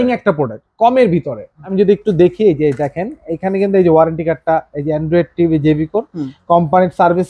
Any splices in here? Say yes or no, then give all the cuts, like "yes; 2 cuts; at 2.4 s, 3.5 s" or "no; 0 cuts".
yes; 1 cut; at 1.6 s